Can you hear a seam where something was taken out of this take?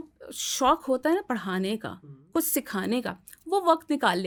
no; 0 cuts

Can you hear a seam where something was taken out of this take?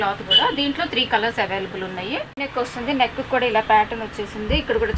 yes; 1 cut; at 2.3 s

